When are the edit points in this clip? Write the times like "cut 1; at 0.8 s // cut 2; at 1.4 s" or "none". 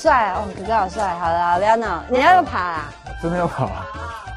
none